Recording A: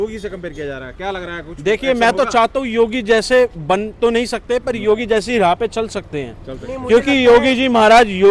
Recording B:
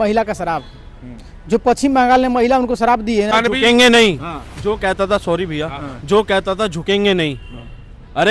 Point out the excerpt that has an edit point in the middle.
B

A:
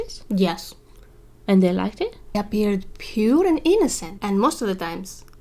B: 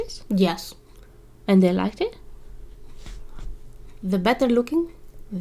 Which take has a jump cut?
A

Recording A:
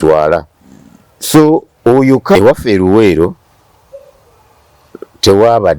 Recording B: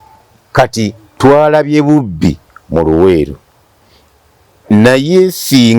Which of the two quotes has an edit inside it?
A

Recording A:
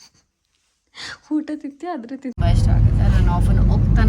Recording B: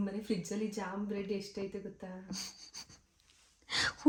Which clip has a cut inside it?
A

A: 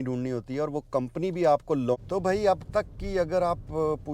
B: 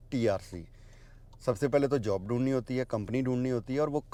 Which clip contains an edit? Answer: A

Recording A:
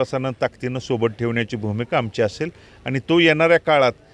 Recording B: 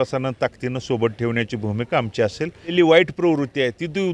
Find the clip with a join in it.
B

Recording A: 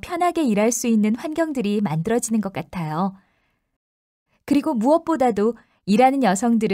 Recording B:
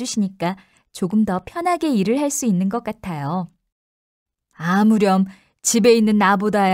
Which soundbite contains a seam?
B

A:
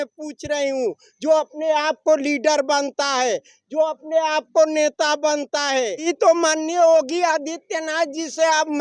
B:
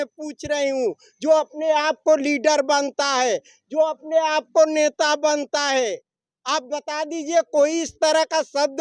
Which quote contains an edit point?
A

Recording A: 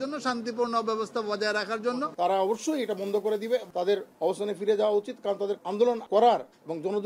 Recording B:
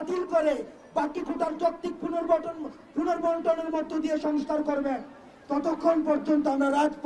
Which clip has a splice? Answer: A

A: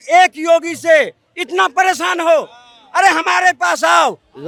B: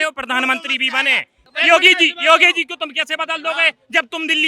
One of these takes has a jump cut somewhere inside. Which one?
B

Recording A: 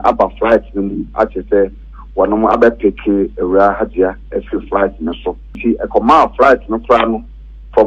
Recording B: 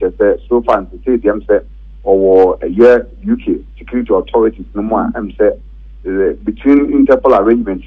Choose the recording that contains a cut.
A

